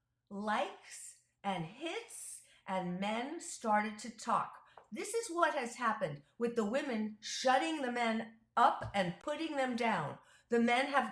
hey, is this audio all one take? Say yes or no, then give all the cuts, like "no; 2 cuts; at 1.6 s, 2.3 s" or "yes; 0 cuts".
no; 1 cut; at 9.2 s